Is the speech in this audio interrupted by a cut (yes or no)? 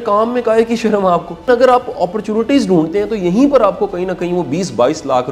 yes